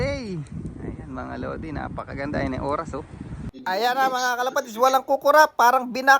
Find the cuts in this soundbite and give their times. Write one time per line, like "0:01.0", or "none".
0:03.5